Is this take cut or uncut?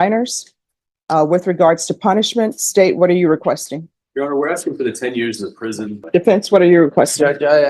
cut